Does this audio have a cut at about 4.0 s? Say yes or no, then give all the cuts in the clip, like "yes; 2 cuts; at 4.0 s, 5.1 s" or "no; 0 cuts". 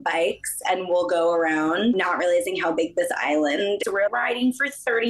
yes; 1 cut; at 4.0 s